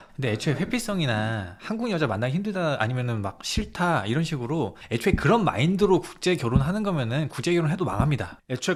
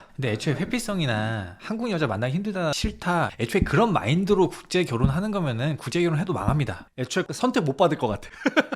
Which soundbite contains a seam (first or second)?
second